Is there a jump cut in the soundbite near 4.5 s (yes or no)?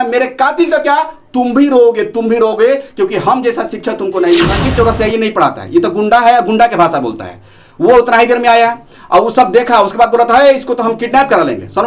yes